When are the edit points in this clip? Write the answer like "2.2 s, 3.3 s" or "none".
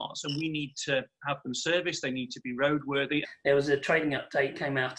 3.3 s